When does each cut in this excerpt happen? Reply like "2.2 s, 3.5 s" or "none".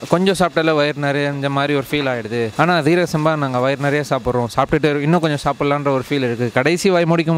none